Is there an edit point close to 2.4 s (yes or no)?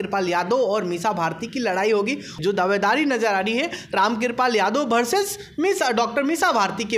yes